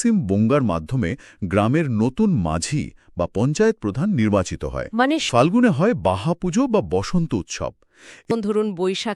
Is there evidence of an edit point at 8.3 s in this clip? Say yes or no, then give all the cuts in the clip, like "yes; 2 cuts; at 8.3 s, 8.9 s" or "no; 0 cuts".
yes; 2 cuts; at 5.2 s, 8.3 s